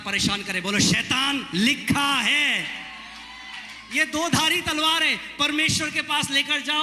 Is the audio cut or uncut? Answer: uncut